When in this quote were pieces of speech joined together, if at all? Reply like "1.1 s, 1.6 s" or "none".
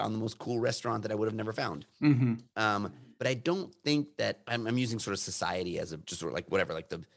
3.0 s, 4.4 s, 6.0 s